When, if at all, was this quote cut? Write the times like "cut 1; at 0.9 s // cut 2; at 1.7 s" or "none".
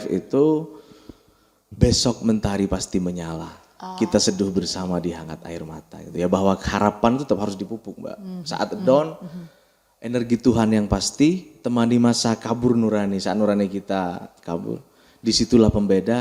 none